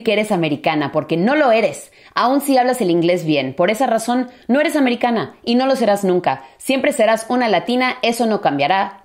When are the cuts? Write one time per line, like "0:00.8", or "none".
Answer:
none

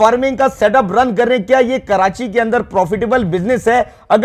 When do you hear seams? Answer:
none

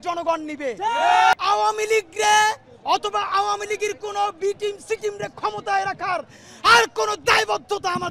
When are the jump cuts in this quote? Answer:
0:01.3

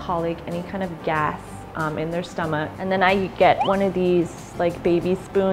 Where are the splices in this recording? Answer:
0:02.7

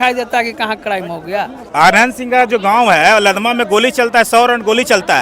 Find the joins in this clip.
0:01.6

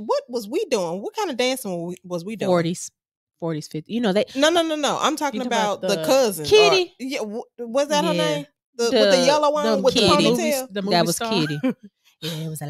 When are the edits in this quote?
none

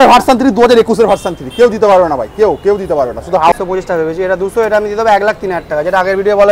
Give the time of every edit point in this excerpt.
0:03.5

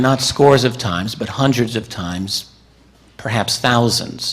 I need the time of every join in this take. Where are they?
0:01.7

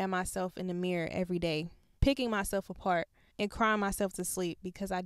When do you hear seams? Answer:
0:01.8
0:03.2

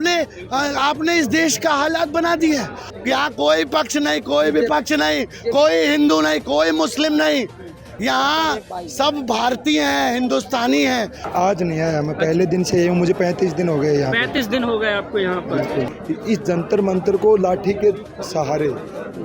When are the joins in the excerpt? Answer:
0:02.8
0:11.3
0:15.9

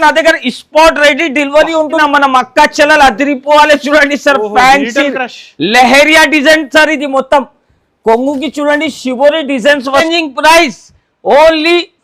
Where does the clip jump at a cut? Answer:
0:02.0
0:10.0

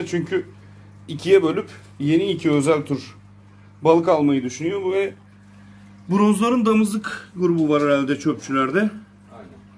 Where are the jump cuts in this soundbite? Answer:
none

